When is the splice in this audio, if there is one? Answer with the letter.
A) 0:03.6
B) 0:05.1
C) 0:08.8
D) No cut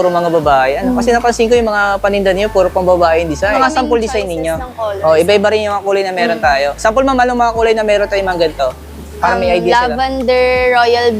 A